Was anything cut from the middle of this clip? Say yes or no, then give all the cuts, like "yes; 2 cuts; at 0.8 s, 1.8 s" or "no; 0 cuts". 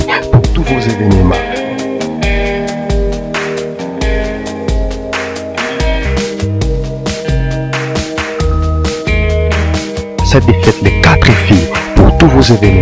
no; 0 cuts